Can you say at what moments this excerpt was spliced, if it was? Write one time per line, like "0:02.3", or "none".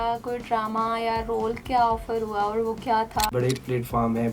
0:03.3